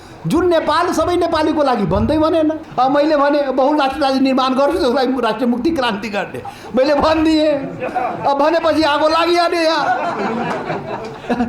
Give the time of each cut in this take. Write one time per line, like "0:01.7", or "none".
0:02.6